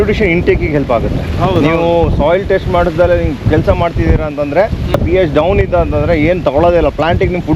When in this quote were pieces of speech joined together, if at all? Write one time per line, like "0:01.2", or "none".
0:04.9